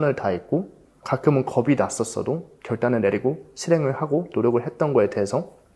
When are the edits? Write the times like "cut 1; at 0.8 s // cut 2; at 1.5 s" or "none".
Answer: none